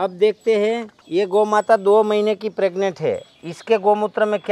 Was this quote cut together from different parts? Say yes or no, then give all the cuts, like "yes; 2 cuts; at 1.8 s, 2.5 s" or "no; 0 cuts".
yes; 1 cut; at 0.9 s